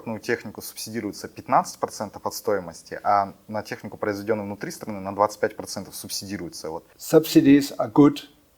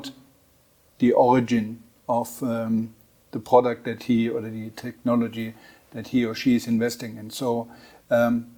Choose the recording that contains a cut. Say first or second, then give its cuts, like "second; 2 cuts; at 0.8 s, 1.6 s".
first; 1 cut; at 6.9 s